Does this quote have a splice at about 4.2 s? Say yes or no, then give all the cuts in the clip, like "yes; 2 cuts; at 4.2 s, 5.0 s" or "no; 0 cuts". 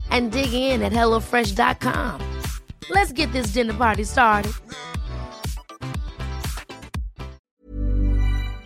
no; 1 cut; at 7.5 s